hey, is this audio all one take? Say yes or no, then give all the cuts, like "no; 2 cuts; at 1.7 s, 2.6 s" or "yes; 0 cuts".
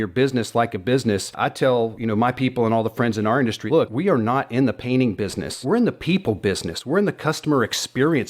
no; 3 cuts; at 1.7 s, 3.7 s, 5.5 s